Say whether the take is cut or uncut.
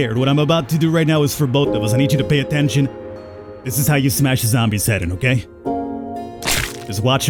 uncut